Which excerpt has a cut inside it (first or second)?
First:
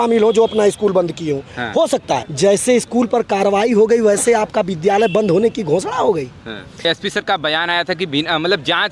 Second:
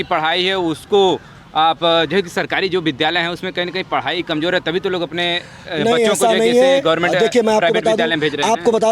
first